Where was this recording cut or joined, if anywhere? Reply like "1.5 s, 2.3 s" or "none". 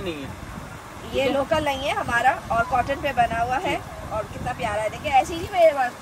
none